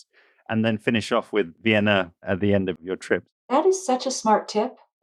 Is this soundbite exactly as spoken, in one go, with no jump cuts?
no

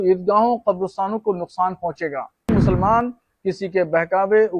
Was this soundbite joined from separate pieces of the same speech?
yes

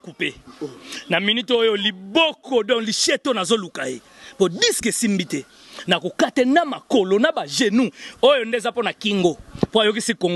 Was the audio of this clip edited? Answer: no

